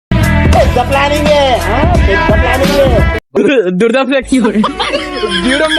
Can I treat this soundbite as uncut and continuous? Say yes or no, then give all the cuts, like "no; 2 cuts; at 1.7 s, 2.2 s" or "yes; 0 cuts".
no; 1 cut; at 3.2 s